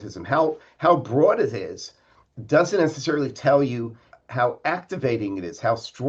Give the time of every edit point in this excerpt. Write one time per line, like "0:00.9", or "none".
none